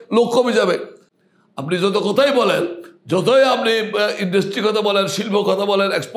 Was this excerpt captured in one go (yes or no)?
yes